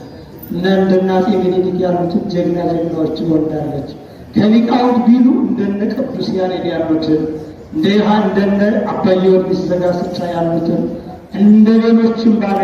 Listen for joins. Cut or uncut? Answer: uncut